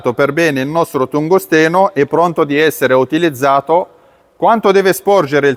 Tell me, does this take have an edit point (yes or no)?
no